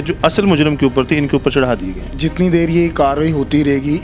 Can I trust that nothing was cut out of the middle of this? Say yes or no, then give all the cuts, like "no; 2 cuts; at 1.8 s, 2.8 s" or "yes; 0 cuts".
no; 1 cut; at 2.1 s